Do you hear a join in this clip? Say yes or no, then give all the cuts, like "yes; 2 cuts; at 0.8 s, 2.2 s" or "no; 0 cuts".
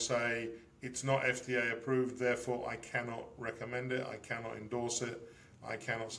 no; 0 cuts